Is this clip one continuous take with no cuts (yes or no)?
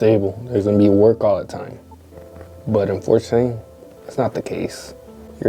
yes